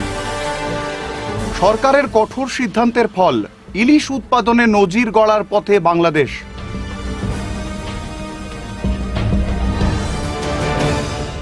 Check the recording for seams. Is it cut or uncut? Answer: cut